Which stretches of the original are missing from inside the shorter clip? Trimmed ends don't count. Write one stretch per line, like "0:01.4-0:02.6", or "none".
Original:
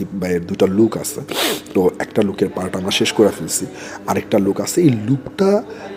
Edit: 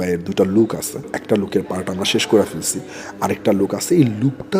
0:01.3-0:02.0